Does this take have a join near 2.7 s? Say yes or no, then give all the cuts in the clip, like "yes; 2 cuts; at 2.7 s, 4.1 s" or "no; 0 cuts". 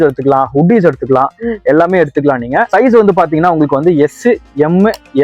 yes; 1 cut; at 2.7 s